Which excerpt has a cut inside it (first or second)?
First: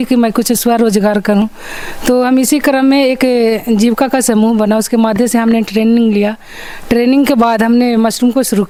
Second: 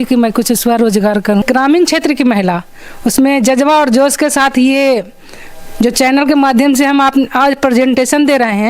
second